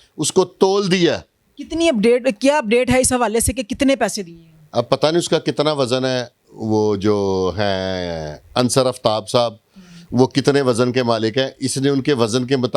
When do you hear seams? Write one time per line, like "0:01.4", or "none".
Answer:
none

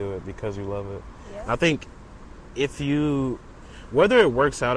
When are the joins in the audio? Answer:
none

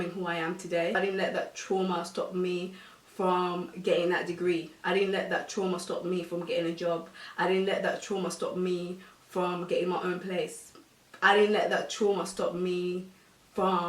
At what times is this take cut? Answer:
none

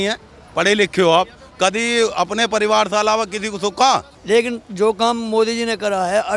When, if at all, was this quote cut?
0:04.1

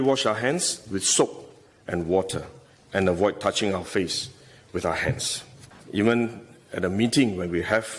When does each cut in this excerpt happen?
0:05.7

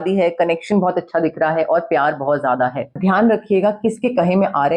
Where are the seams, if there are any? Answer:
0:03.0

